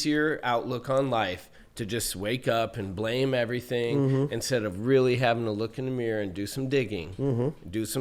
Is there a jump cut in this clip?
no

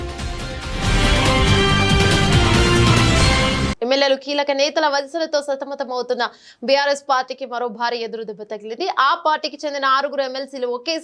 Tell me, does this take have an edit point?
yes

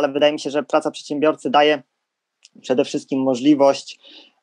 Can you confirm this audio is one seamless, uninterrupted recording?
yes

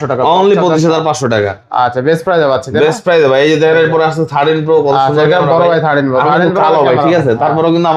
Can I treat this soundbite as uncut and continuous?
yes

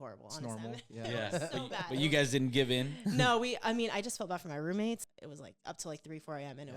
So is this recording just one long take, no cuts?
no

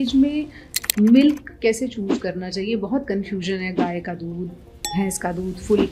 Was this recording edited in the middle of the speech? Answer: no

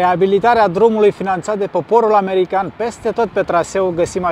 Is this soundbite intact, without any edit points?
yes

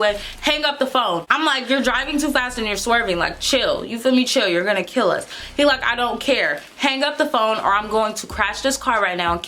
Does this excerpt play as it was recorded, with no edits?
no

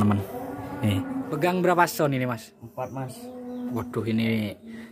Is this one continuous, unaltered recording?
no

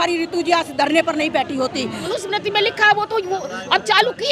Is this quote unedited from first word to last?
no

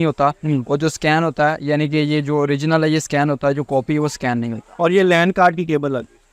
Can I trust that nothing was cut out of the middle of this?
no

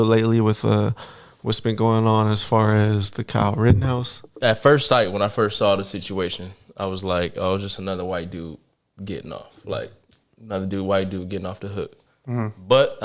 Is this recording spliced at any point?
yes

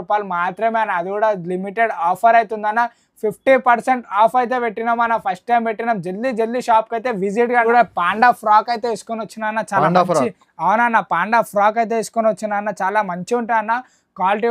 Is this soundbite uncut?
no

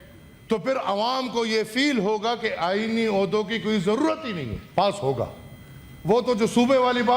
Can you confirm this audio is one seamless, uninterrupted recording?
no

